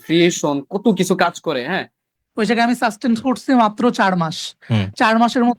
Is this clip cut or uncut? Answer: cut